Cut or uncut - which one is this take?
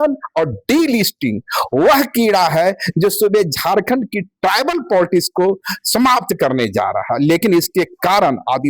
uncut